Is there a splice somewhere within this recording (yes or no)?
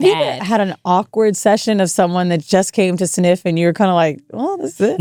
no